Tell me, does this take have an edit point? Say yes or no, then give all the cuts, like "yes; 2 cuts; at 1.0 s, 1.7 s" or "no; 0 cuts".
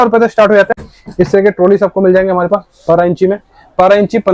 yes; 1 cut; at 0.9 s